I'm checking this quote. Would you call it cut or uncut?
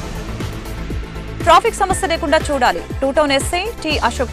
cut